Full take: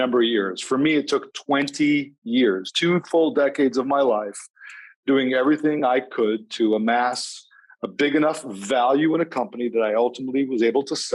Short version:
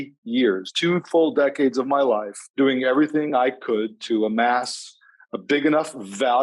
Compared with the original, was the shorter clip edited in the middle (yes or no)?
yes